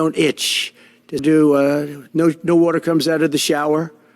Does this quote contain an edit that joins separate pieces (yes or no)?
yes